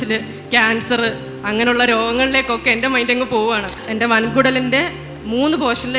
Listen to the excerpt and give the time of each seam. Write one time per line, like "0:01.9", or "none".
0:03.8